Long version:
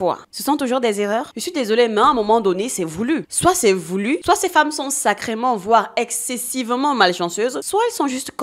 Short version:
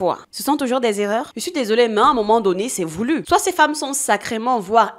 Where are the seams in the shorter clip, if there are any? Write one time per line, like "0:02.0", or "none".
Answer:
0:03.2